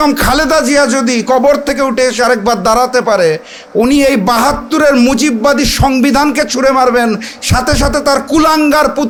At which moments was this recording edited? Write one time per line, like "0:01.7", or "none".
none